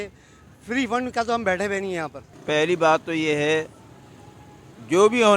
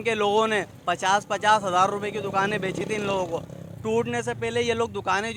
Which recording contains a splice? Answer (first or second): first